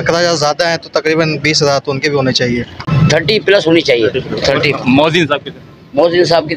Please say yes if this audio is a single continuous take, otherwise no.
no